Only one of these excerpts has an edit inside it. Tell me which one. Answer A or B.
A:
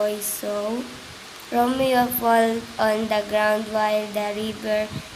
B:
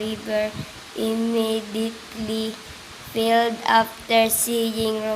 B